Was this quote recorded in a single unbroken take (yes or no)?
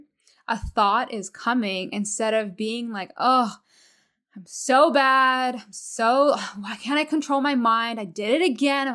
yes